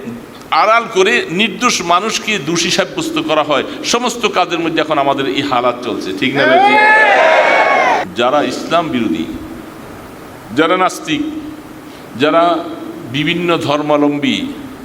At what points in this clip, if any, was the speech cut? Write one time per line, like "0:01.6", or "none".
0:08.1